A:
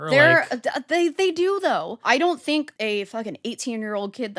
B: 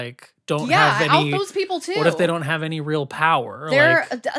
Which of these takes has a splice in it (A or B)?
A